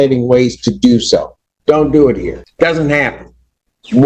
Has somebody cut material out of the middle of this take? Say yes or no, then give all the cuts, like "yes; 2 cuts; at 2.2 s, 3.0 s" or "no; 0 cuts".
yes; 1 cut; at 2.4 s